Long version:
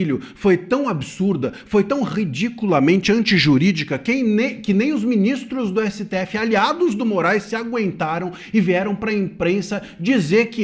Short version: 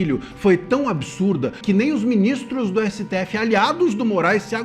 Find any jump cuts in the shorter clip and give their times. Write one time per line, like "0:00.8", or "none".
0:01.6